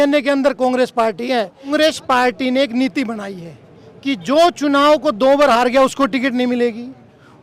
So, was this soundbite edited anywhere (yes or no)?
yes